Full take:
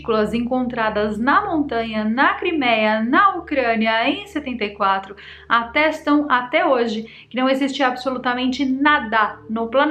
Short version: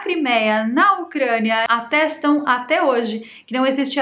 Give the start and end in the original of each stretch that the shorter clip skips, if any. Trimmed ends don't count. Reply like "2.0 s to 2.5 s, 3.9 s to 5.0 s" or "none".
4.0 s to 5.5 s